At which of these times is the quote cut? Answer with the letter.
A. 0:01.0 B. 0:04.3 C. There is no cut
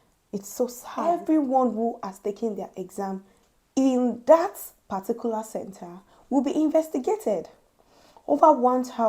A